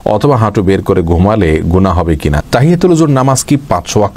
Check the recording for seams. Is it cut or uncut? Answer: cut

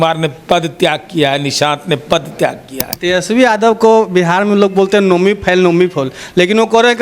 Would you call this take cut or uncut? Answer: cut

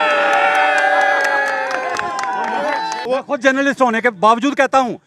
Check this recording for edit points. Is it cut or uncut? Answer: cut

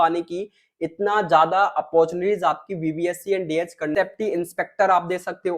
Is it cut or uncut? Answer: cut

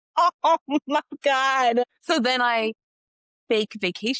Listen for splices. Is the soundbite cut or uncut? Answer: cut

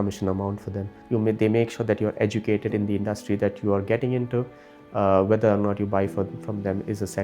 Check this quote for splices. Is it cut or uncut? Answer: cut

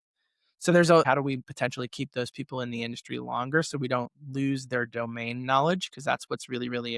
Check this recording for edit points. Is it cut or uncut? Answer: cut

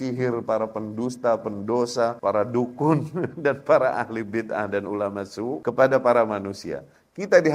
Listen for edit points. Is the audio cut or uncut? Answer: cut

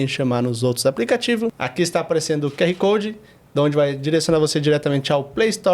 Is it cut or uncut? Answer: cut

